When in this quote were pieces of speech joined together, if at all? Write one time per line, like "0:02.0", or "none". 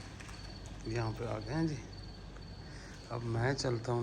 none

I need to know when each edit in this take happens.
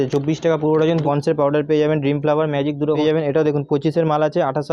0:01.0
0:03.0

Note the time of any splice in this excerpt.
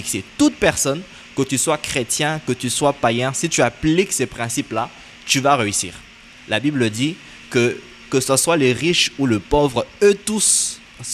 none

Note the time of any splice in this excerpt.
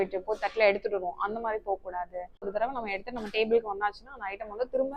0:02.5

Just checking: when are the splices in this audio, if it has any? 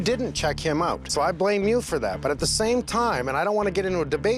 0:01.1

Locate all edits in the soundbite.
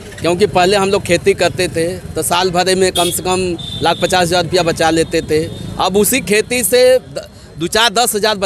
none

